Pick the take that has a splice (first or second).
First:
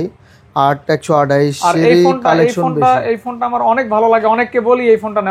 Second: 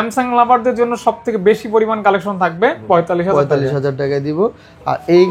second